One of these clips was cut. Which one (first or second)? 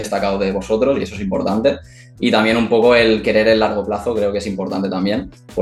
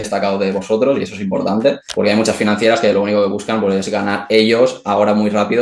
second